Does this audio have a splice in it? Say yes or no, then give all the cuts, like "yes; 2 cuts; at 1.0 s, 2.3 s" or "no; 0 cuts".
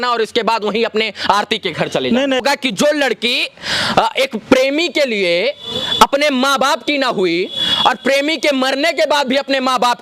yes; 1 cut; at 2.4 s